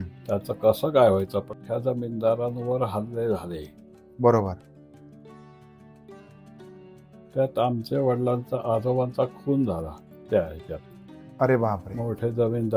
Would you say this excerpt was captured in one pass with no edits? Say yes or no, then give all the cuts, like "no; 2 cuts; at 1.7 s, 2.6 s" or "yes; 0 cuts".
no; 1 cut; at 1.5 s